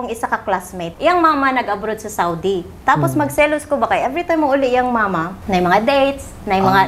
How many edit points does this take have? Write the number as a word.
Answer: two